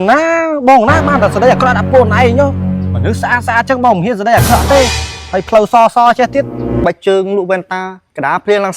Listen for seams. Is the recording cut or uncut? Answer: cut